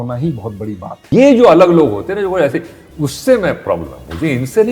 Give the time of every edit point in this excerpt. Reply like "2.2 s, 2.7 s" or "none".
1.0 s